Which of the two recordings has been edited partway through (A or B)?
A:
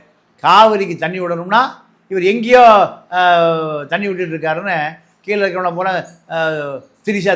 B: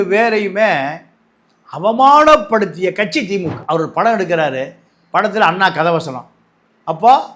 B